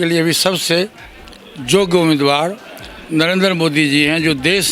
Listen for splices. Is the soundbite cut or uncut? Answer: uncut